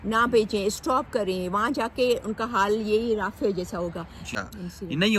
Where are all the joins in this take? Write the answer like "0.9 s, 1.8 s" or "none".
4.3 s